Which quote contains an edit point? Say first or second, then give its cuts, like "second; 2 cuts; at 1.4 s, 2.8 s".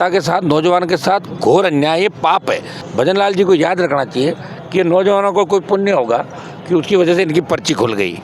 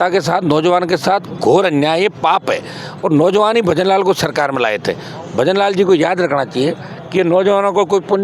first; 1 cut; at 2.8 s